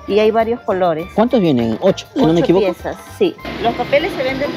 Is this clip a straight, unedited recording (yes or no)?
no